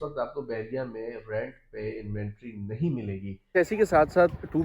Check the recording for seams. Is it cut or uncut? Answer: cut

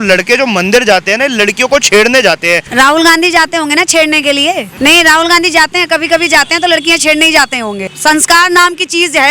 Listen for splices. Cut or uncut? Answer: cut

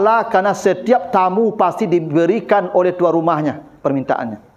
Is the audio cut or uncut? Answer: uncut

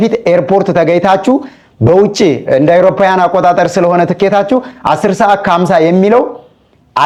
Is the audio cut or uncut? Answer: uncut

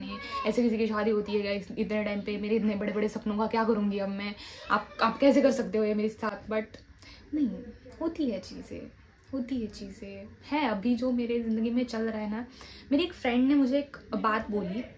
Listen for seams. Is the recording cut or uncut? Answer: uncut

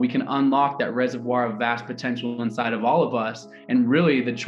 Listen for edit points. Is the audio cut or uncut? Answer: uncut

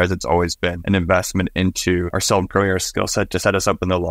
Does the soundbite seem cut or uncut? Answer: cut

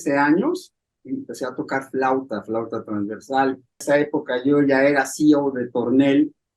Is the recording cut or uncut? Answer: cut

